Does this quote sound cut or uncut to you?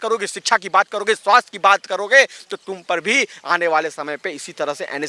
uncut